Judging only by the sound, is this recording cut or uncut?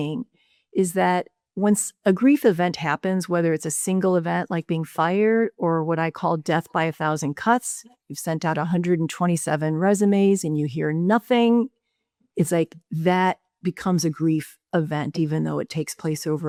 uncut